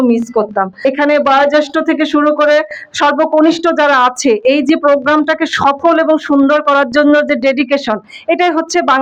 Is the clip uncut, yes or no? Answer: yes